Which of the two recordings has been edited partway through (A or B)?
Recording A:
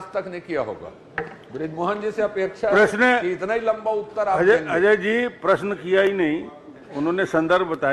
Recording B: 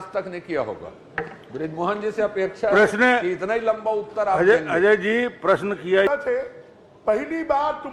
B